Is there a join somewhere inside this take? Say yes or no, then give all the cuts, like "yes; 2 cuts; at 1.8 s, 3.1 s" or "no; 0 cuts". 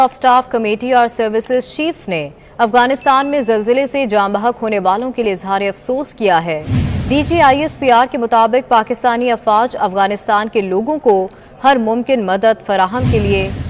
no; 0 cuts